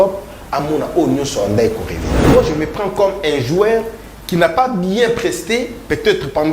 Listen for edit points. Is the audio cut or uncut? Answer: cut